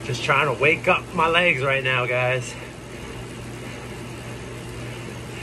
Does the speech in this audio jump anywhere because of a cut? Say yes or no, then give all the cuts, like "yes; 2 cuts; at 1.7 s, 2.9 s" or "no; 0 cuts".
no; 0 cuts